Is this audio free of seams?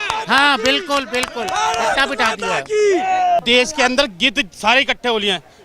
no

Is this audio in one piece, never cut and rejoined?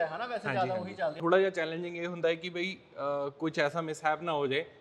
no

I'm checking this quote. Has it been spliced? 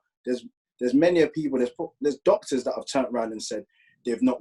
no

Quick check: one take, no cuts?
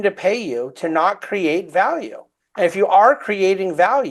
yes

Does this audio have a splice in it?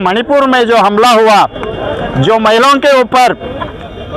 no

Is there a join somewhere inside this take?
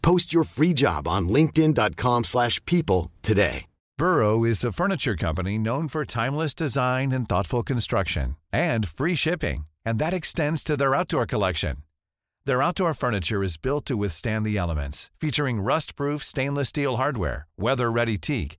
no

